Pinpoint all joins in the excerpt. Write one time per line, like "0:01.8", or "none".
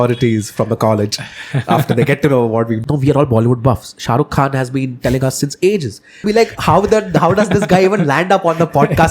0:02.8
0:06.3